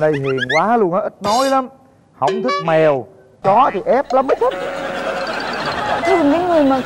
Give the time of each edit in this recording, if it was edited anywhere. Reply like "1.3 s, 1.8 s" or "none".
none